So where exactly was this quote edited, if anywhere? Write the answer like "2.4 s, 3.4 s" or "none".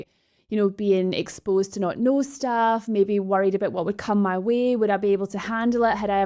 none